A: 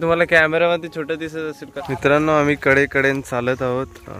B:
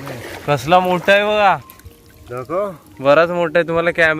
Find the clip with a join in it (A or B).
A